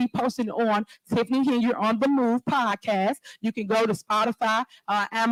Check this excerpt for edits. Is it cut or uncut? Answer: uncut